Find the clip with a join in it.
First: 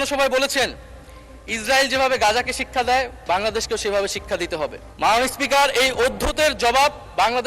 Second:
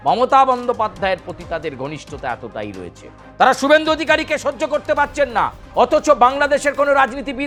first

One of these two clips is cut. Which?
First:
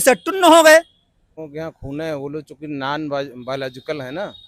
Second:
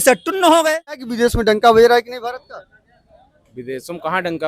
second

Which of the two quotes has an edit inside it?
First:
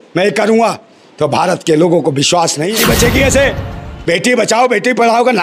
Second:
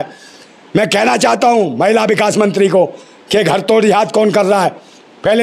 first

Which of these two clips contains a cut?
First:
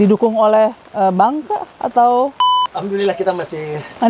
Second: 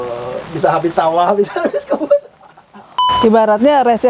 second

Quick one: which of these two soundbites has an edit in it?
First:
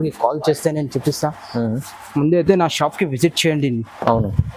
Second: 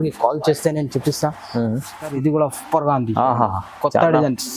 second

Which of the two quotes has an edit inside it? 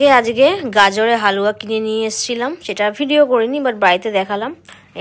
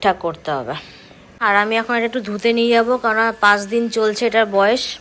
second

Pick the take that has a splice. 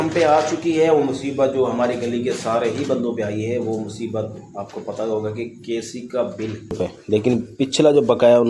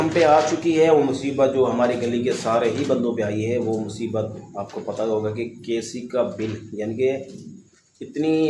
first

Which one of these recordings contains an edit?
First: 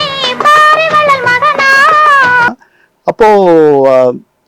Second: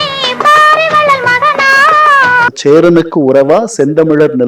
second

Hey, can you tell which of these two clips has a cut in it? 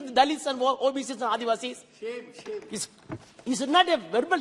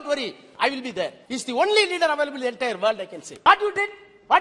second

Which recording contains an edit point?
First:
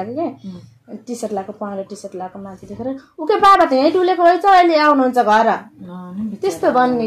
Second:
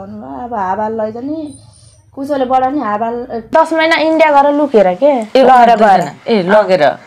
second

